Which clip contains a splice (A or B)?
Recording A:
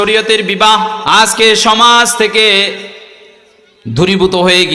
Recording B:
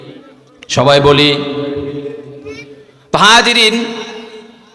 A